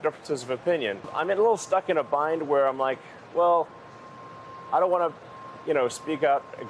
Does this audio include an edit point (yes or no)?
yes